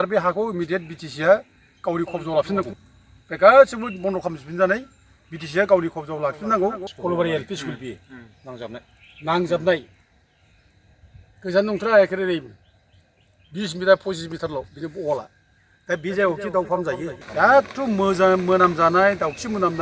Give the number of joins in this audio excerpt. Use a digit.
2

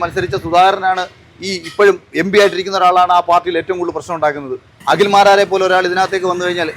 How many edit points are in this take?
1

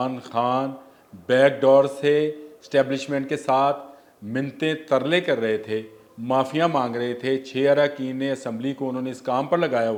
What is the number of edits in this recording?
0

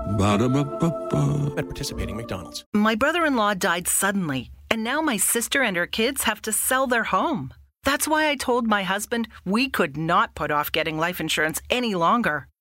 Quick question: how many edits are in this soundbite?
1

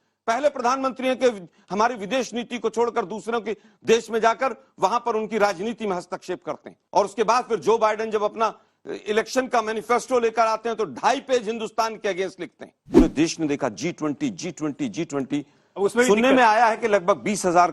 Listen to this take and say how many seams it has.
1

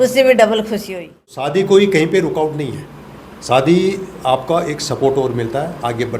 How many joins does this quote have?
1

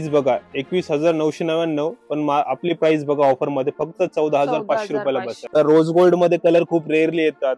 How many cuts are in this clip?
1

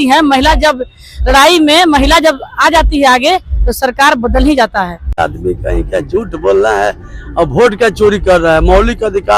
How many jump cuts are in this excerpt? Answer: 1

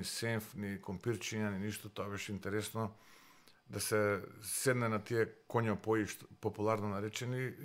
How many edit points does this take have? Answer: 0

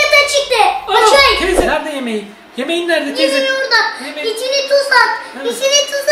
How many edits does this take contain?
1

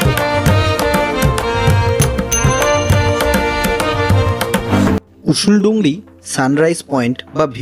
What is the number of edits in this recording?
1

